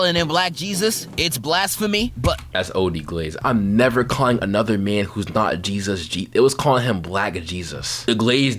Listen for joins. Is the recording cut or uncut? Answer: cut